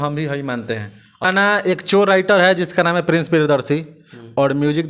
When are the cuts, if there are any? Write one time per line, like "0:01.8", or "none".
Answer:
0:01.2